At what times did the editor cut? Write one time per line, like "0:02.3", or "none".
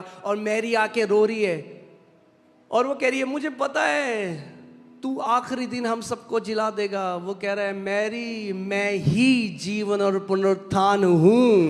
none